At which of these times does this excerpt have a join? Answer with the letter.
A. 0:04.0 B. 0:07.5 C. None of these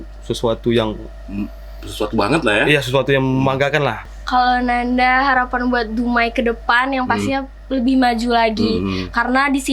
A